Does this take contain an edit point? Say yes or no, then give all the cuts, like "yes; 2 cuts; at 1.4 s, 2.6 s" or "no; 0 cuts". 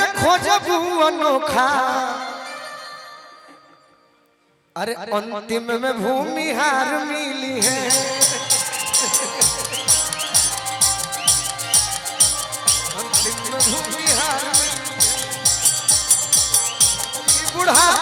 no; 0 cuts